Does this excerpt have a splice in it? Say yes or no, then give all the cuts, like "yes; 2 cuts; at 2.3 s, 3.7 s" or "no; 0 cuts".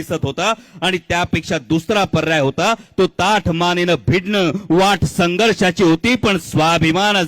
no; 0 cuts